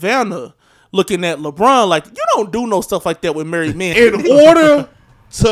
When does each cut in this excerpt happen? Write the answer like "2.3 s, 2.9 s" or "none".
3.9 s